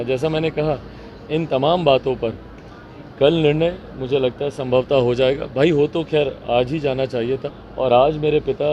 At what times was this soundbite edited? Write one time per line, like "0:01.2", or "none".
0:07.5